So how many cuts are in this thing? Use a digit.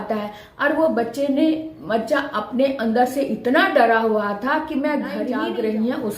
1